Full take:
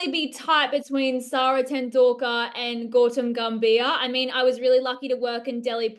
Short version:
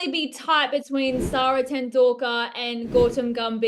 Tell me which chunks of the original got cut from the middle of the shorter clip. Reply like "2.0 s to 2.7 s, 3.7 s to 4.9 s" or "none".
none